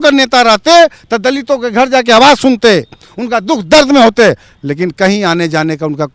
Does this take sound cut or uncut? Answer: uncut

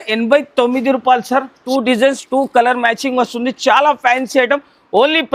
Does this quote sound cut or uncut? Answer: cut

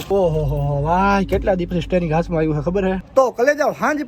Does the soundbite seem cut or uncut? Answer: cut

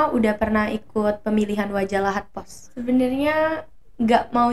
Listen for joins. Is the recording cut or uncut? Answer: cut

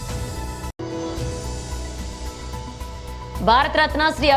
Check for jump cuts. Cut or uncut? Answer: uncut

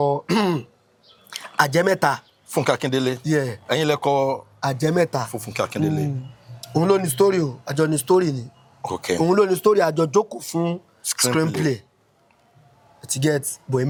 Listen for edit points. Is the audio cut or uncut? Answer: uncut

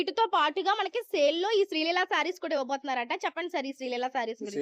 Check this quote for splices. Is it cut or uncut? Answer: uncut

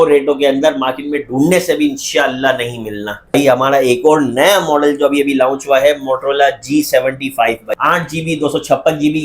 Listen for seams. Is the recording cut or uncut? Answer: cut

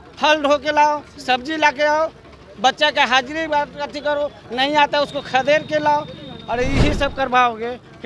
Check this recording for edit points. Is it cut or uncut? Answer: uncut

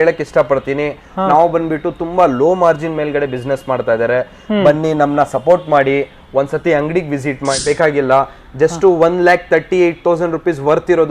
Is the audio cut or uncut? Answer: cut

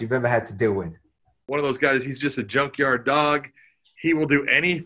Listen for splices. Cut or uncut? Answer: cut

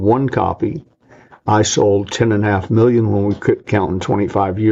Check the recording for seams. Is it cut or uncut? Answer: uncut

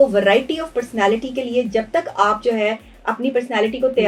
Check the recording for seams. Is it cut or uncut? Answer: uncut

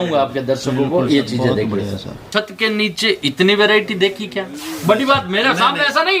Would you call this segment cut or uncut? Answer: cut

